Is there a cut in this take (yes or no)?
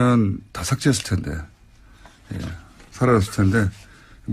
yes